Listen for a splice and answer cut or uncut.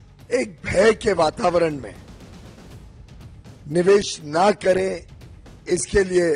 uncut